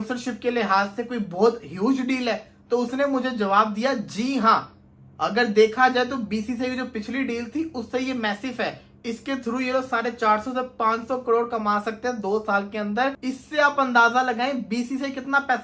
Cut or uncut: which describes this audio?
cut